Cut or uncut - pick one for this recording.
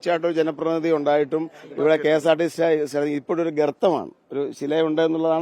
uncut